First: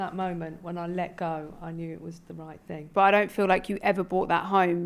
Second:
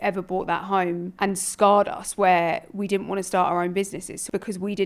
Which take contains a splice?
first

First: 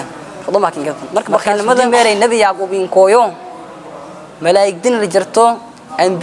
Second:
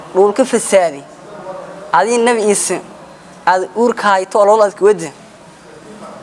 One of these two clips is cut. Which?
first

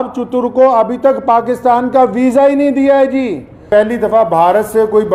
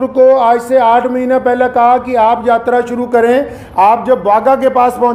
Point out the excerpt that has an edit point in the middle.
first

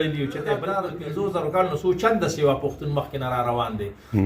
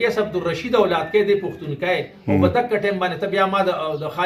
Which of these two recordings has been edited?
first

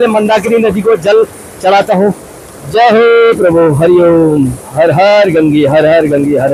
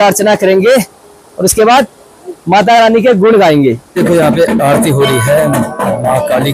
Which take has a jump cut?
second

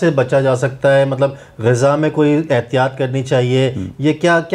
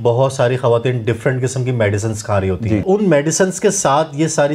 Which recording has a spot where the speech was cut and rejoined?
second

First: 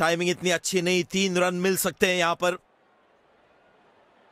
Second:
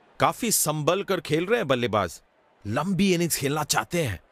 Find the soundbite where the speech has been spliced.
first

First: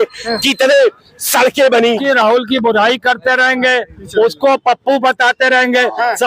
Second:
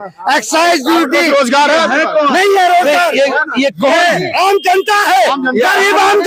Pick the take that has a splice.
first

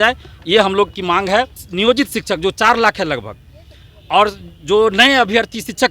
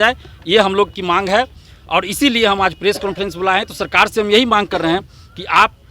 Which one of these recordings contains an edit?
first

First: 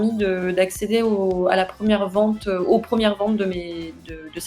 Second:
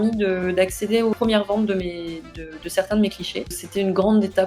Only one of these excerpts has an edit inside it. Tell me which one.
second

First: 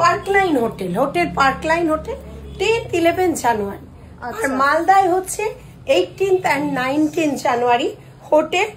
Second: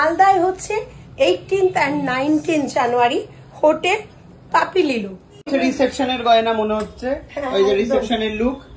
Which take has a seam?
second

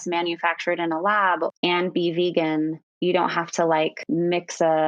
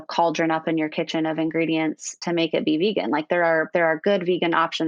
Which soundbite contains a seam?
first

